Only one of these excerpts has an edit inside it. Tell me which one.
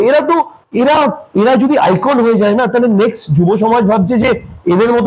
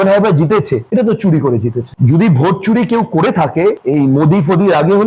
second; 1 cut; at 1.9 s

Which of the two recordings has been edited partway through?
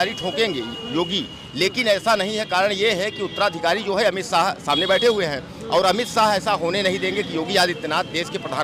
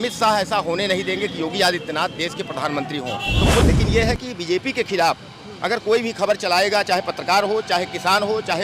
second; 1 cut; at 3.7 s

